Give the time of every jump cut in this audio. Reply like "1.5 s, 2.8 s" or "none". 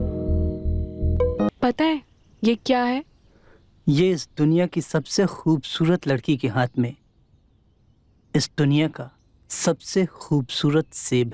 1.5 s